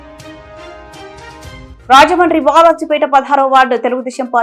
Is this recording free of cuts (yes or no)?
yes